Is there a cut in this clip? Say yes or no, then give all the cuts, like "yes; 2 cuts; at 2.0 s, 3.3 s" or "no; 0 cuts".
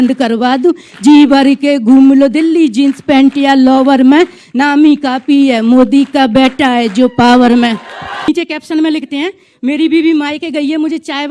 yes; 1 cut; at 8.3 s